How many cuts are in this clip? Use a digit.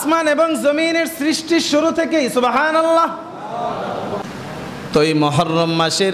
1